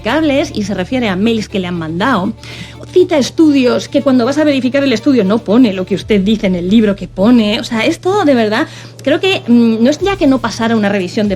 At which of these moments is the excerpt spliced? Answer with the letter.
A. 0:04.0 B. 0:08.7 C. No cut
C